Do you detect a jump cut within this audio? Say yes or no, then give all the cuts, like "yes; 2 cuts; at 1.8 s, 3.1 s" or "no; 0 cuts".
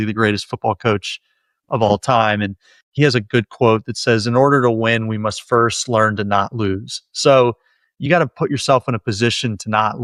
no; 0 cuts